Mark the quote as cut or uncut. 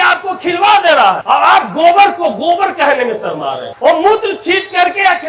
cut